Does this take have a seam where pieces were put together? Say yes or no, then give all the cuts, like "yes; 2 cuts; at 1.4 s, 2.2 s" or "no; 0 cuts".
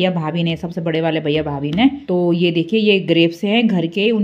yes; 1 cut; at 2.0 s